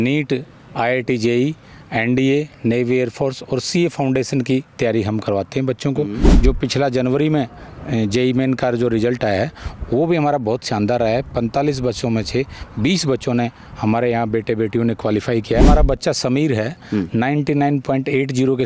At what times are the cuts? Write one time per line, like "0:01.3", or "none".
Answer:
0:06.4
0:15.6